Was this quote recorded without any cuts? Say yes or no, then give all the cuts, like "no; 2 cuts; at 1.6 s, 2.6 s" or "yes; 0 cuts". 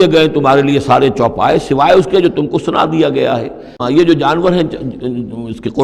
no; 1 cut; at 3.8 s